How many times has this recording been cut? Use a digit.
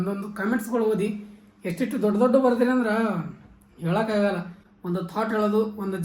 1